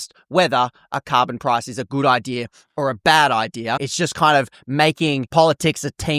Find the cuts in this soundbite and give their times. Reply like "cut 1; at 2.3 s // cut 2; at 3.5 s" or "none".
cut 1; at 3.8 s // cut 2; at 5.2 s